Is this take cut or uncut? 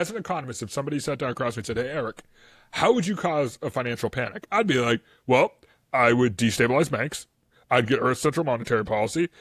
uncut